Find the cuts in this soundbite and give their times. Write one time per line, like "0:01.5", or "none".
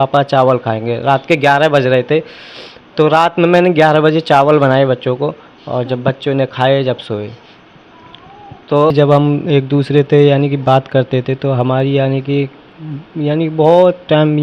0:08.9